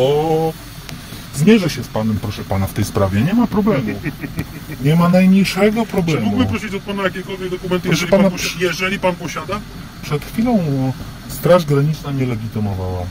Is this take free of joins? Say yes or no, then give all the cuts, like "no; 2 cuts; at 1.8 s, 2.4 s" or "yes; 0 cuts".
yes; 0 cuts